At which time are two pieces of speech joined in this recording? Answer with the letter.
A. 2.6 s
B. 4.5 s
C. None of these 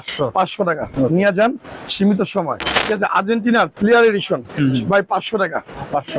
A